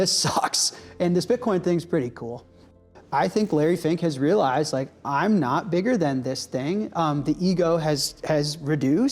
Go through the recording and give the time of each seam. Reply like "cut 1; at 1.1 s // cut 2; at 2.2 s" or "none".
cut 1; at 2.8 s